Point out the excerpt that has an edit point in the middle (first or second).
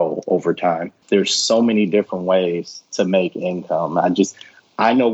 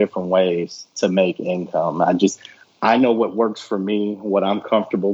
first